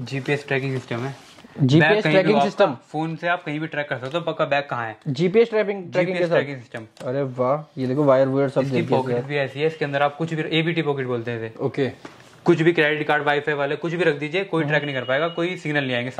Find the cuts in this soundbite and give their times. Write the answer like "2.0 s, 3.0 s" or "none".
none